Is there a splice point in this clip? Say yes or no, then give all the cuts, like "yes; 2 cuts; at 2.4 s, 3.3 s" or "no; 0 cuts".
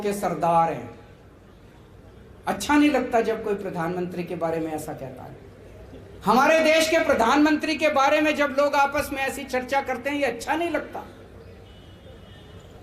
no; 0 cuts